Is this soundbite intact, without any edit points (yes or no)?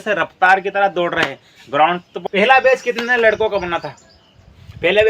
no